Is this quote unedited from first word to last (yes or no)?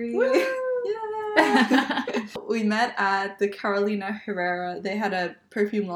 no